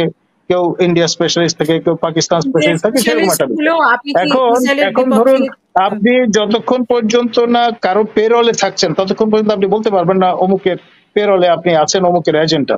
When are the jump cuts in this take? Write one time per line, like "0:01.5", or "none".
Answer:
none